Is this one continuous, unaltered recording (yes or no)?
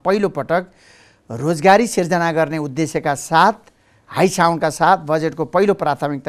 yes